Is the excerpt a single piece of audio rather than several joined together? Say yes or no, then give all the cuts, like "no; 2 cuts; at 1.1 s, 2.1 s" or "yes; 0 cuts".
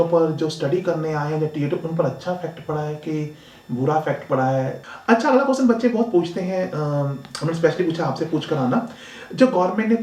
no; 1 cut; at 4.8 s